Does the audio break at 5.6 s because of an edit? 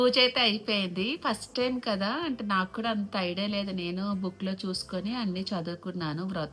no; 0 cuts

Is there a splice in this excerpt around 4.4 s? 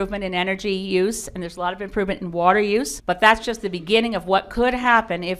no; 1 cut; at 2.9 s

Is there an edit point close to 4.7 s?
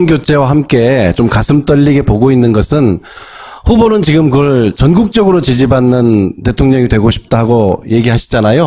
no; 0 cuts

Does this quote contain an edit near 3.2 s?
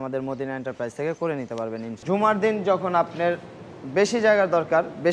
no; 1 cut; at 2.0 s

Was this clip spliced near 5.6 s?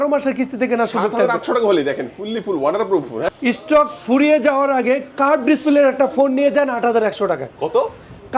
no; 1 cut; at 3.3 s

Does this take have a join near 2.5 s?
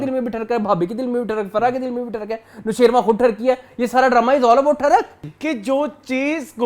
no; 1 cut; at 5.2 s

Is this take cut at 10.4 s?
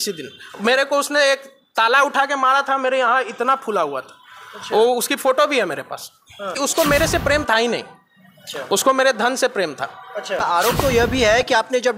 yes; 2 cuts; at 6.6 s, 10.4 s

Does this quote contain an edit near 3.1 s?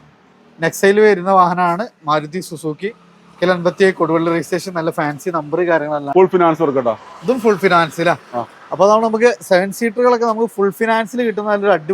no; 1 cut; at 6.1 s

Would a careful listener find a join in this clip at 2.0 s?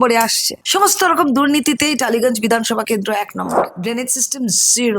no; 1 cut; at 3.7 s

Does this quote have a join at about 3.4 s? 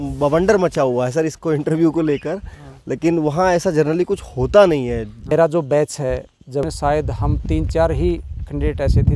no; 2 cuts; at 5.3 s, 6.7 s

